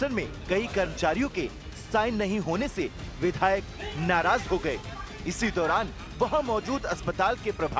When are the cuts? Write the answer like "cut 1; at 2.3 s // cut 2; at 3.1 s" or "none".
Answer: none